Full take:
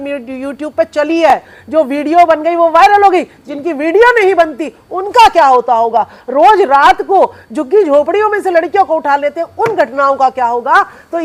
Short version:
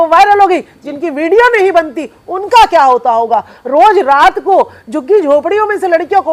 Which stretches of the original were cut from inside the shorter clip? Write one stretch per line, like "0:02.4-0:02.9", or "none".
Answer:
none

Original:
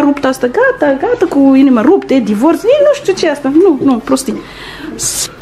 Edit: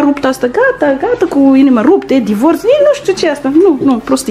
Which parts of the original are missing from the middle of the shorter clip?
none

